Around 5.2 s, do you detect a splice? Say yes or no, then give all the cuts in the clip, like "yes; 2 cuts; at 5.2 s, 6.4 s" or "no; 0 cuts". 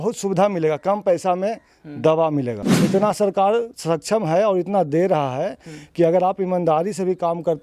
no; 1 cut; at 2.7 s